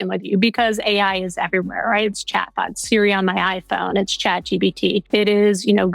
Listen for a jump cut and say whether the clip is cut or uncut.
cut